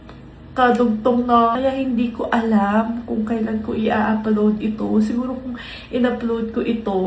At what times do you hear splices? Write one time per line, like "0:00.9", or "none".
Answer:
0:01.5